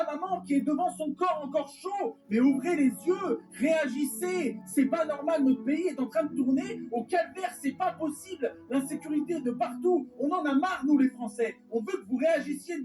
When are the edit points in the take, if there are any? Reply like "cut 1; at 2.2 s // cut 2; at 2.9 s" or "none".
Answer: cut 1; at 12.0 s